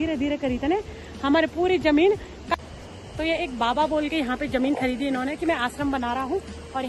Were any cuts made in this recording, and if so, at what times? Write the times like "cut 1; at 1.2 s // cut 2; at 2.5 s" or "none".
cut 1; at 2.5 s